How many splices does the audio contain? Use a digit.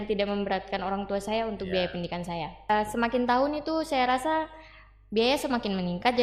1